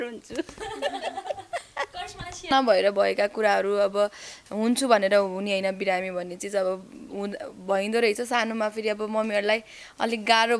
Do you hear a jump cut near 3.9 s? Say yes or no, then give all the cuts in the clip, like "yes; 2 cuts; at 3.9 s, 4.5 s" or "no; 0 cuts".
no; 1 cut; at 2.5 s